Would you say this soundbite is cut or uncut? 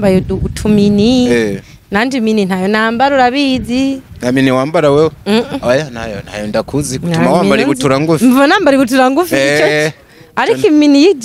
uncut